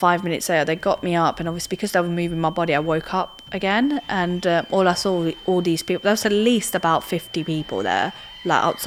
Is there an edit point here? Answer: no; 0 cuts

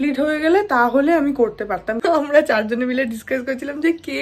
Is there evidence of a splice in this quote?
yes; 1 cut; at 2.0 s

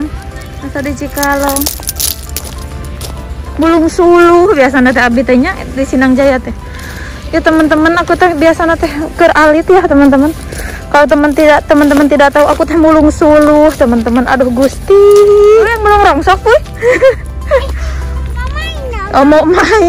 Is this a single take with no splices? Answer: no; 1 cut; at 15.8 s

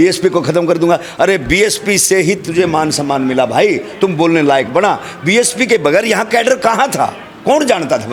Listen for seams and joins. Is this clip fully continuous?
yes; 0 cuts

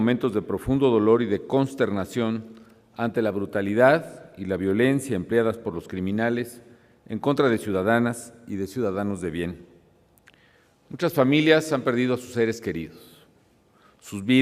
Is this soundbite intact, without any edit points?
no; 1 cut; at 9.4 s

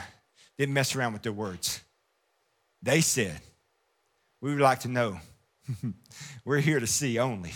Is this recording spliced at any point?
no; 0 cuts

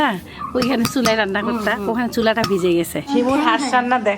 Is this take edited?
yes; 1 cut; at 3.0 s

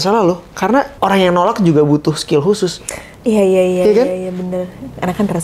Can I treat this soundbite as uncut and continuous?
no; 1 cut; at 0.9 s

